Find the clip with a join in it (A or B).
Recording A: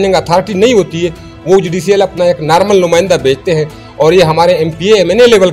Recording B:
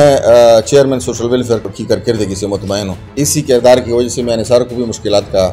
B